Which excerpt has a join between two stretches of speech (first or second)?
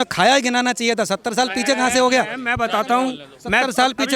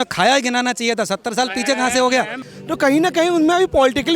second